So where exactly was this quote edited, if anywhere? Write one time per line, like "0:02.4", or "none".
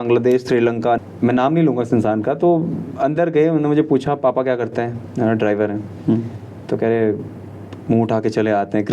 0:01.0